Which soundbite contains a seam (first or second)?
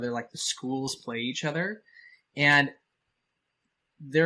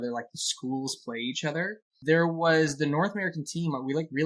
second